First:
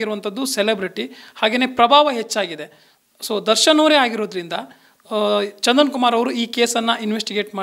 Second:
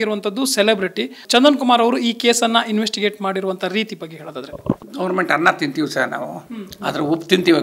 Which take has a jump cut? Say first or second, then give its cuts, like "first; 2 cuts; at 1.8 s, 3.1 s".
second; 2 cuts; at 1.2 s, 4.9 s